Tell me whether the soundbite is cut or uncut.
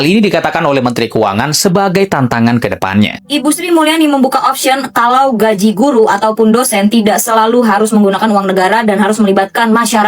cut